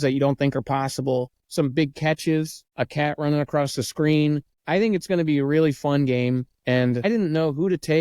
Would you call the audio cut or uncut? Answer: cut